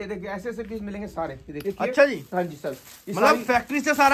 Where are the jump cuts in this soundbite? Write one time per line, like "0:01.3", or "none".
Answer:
0:01.6

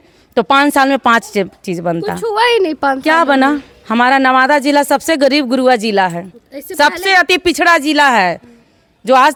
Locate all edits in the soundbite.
none

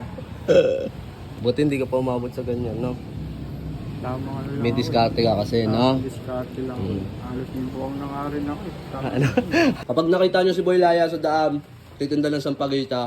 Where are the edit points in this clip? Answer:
0:01.3
0:09.8

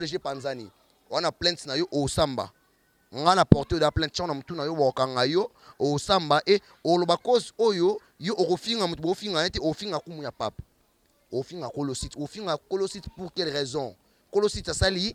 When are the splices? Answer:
none

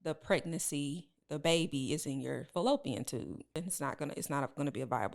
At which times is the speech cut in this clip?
0:03.6

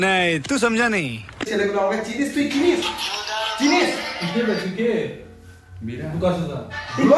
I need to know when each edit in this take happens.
0:01.4

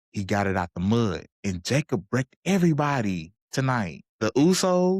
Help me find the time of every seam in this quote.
0:01.3
0:04.0

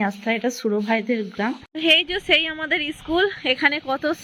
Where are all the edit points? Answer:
0:01.7

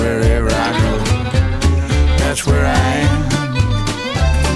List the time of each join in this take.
none

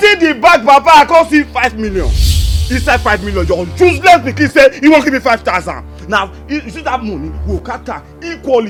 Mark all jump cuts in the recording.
none

